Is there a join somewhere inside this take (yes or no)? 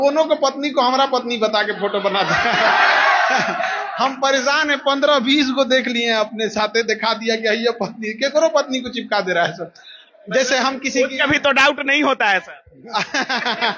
no